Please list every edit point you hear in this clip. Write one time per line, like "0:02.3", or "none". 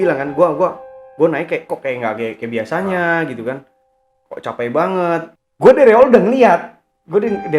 0:05.4